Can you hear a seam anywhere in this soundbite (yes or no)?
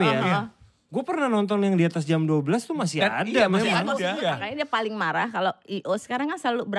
yes